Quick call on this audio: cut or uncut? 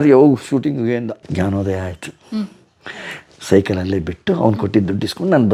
uncut